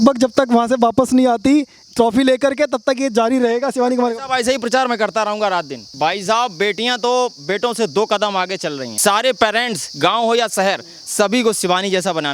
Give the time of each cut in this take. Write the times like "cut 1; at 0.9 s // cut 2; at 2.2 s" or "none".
cut 1; at 5.8 s // cut 2; at 8.9 s